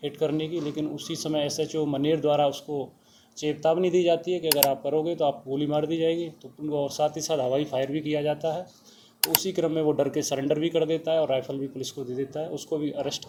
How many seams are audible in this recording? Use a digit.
0